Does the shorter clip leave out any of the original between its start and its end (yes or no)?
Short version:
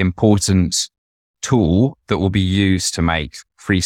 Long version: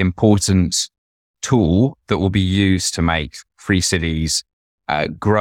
no